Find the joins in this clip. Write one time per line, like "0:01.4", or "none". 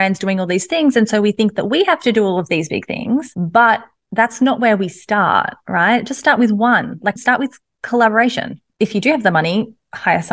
0:03.4
0:08.7